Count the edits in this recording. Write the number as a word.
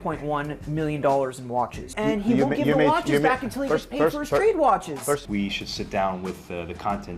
two